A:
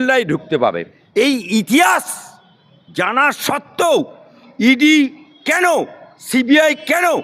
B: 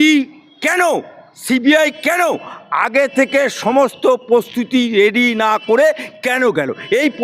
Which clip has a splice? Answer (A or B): A